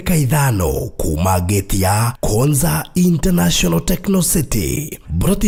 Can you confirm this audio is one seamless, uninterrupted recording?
yes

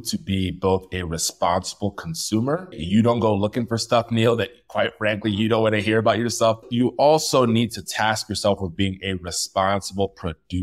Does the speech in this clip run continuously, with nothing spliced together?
no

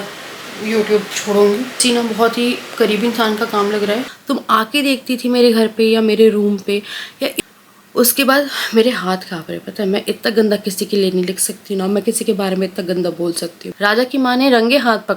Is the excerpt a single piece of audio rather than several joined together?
no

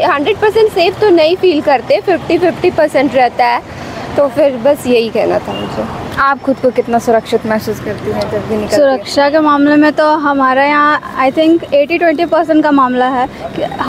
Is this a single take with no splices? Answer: yes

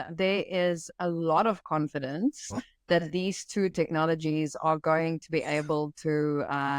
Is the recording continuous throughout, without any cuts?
yes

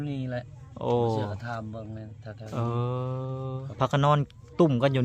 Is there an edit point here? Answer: yes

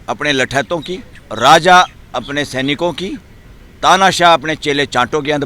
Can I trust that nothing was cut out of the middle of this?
no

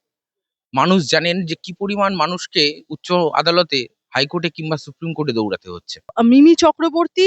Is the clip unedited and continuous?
yes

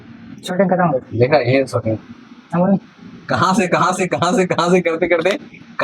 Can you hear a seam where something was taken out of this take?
no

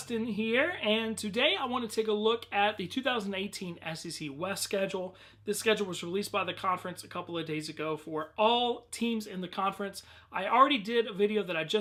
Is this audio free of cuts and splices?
yes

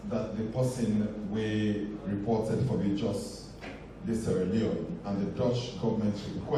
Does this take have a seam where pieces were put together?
no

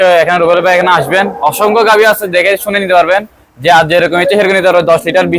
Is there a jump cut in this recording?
no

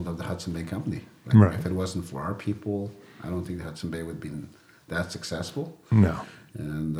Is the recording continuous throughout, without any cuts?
yes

